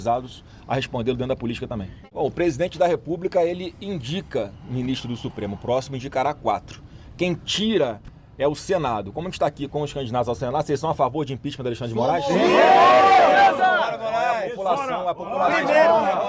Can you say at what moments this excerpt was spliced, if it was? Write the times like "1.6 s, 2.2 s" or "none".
2.0 s